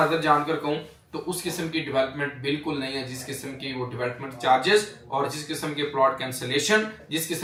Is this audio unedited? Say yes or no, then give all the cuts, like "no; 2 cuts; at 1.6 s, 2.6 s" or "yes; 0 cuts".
yes; 0 cuts